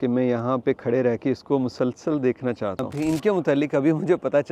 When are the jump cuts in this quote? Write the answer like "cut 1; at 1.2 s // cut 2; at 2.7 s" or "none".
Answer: cut 1; at 2.9 s